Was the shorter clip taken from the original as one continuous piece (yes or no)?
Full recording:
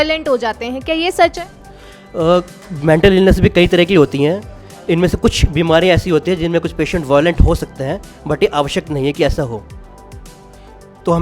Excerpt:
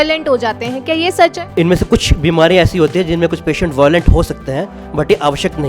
no